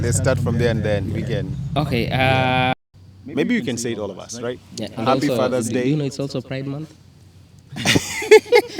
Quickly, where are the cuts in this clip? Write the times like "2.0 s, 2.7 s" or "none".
2.7 s